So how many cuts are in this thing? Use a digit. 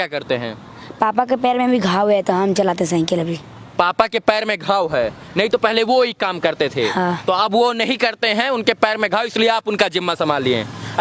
0